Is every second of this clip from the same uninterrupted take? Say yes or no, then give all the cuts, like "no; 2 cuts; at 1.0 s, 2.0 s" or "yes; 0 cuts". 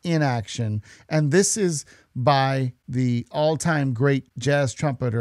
yes; 0 cuts